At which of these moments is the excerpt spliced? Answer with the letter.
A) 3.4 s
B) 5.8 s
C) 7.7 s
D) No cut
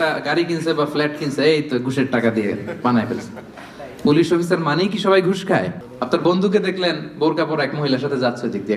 B